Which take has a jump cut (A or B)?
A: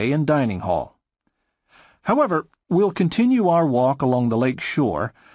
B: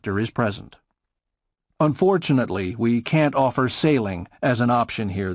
A